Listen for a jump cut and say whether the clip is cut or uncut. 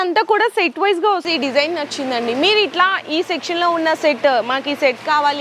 cut